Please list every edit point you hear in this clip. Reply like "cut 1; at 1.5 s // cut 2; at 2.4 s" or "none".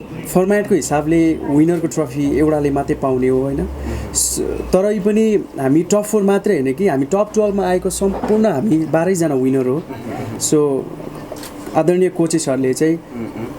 none